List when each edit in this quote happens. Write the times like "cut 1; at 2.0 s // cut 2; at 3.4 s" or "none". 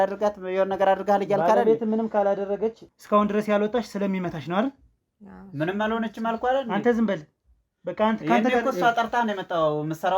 cut 1; at 2.9 s